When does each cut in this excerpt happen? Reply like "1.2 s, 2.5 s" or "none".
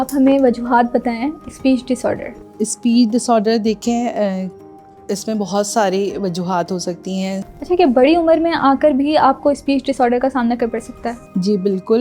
7.5 s